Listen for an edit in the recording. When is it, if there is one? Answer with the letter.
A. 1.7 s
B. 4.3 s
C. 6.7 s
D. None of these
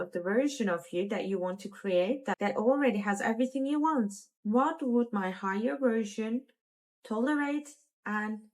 B